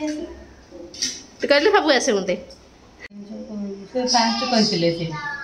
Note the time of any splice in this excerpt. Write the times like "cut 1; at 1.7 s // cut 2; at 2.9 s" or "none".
cut 1; at 3.1 s